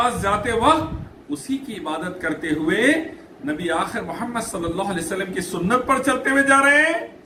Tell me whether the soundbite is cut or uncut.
uncut